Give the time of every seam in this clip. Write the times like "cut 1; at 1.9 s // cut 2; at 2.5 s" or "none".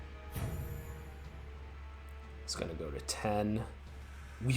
none

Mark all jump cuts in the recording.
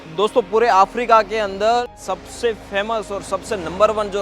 cut 1; at 2.0 s

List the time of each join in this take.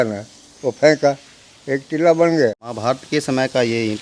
cut 1; at 2.7 s

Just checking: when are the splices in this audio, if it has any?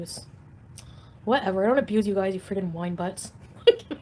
none

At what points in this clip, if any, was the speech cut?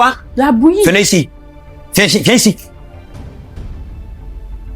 cut 1; at 2.6 s

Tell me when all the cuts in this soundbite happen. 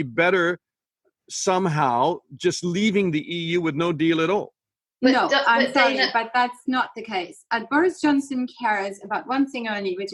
none

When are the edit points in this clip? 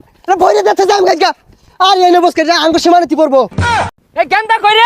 cut 1; at 3.9 s

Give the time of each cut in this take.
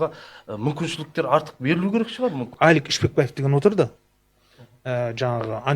cut 1; at 2.5 s

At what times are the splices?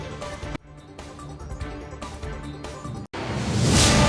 cut 1; at 3.0 s

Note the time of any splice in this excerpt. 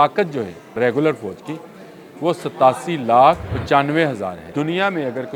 cut 1; at 0.8 s // cut 2; at 3.5 s // cut 3; at 4.4 s

